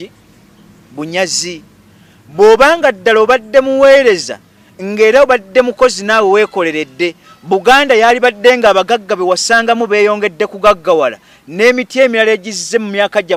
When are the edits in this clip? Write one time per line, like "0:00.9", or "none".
none

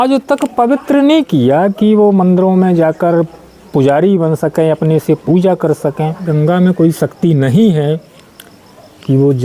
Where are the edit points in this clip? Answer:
0:06.3

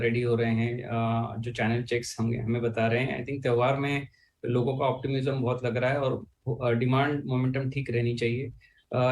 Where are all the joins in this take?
0:03.2

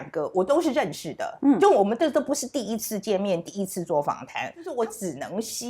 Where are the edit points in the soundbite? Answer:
0:04.7

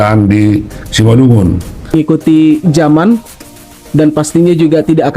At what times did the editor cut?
0:01.9

